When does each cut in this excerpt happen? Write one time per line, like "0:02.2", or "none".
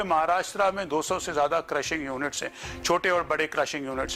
none

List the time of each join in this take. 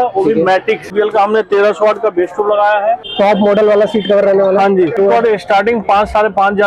0:00.9
0:03.1
0:05.0

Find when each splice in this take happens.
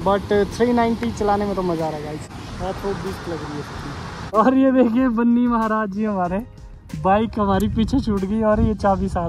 0:02.3
0:04.1

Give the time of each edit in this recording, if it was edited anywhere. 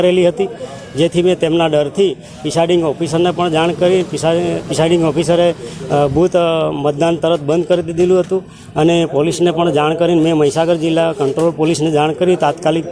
none

